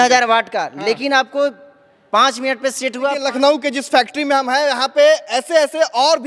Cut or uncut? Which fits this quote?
cut